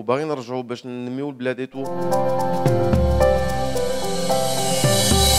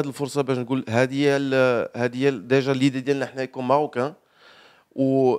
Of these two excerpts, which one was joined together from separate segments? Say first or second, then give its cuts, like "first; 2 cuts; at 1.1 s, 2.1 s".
first; 1 cut; at 1.9 s